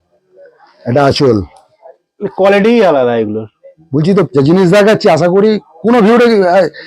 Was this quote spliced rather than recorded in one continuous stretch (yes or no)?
yes